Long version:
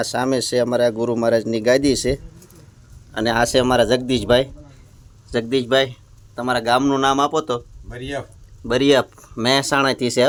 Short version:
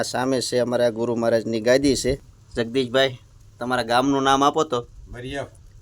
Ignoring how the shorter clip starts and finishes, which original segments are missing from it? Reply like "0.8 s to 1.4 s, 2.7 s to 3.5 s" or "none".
2.4 s to 5.1 s